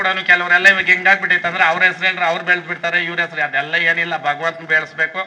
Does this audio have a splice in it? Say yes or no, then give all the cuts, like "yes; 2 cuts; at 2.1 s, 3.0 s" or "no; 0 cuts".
no; 0 cuts